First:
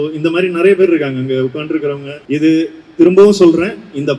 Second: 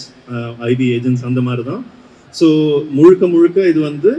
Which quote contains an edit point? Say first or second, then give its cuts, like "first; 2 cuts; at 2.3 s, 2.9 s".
first; 1 cut; at 2.1 s